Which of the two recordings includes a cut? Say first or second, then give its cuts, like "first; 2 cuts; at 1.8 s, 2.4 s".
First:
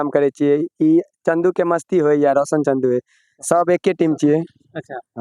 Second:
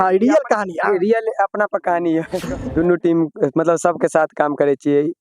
second; 1 cut; at 2.4 s